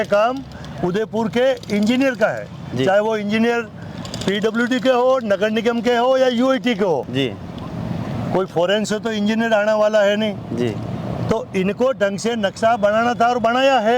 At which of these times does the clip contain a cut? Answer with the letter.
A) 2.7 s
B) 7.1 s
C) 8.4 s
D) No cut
D